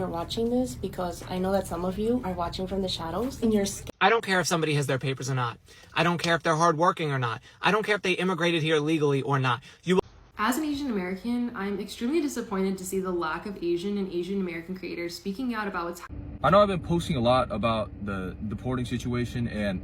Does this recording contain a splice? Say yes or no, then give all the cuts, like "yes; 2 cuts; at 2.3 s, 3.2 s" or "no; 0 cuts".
yes; 3 cuts; at 3.8 s, 10.0 s, 16.0 s